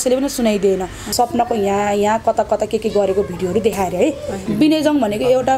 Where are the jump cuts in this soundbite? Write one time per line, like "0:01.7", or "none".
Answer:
0:01.1
0:04.4